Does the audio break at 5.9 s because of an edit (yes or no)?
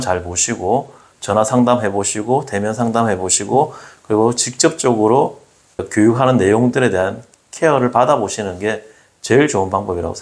yes